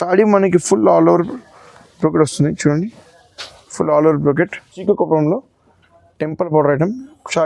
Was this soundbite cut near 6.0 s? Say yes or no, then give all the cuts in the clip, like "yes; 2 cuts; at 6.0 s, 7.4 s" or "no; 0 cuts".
no; 1 cut; at 4.7 s